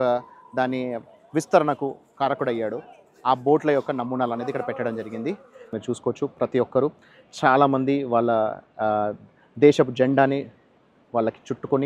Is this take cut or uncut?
cut